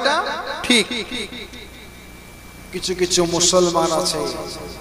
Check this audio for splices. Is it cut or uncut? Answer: uncut